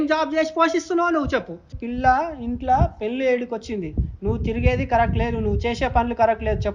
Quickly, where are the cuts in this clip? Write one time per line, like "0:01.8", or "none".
0:01.7